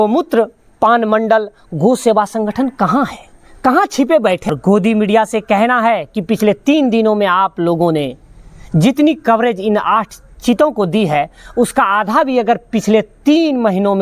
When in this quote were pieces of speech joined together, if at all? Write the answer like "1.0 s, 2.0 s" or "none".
4.5 s